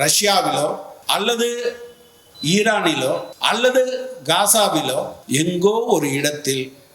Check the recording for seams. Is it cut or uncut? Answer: cut